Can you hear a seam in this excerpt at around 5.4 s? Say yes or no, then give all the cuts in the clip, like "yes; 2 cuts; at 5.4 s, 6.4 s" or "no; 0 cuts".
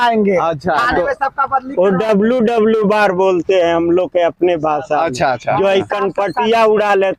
no; 0 cuts